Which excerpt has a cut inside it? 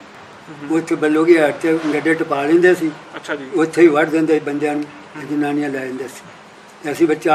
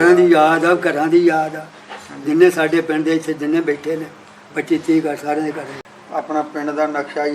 second; 1 cut; at 5.8 s

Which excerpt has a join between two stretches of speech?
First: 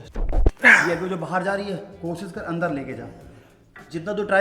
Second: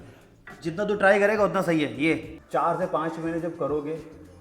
second; 1 cut; at 2.3 s

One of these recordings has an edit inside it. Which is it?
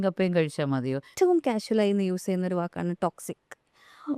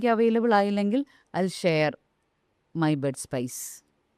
first; 1 cut; at 1.1 s

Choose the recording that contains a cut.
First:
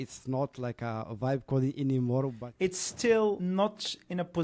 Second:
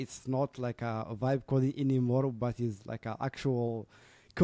first; 1 cut; at 2.4 s

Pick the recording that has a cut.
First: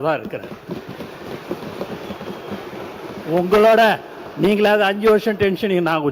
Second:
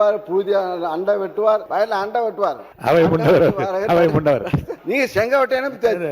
second; 3 cuts; at 1.7 s, 2.7 s, 4.7 s

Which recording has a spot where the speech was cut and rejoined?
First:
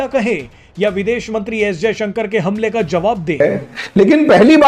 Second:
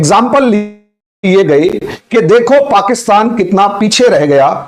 first; 1 cut; at 3.4 s

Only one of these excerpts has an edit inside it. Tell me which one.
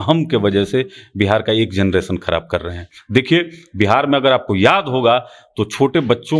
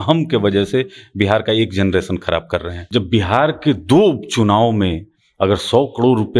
second; 1 cut; at 2.8 s

